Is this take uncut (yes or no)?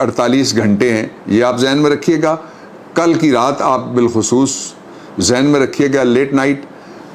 yes